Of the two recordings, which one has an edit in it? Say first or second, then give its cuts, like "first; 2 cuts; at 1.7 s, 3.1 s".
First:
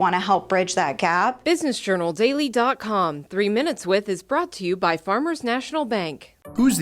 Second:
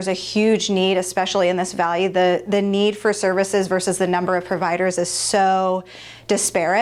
first; 1 cut; at 1.4 s